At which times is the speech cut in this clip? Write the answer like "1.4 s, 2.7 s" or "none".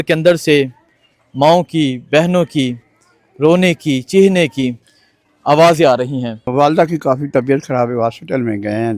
6.4 s